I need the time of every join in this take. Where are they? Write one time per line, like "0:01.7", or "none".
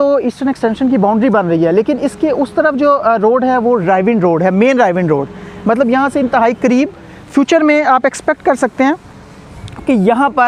none